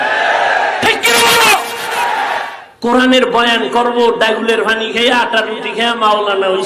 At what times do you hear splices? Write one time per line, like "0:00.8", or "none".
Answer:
0:02.6